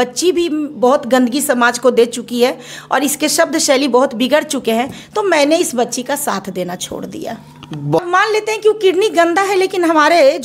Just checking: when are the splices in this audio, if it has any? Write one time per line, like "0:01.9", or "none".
0:08.0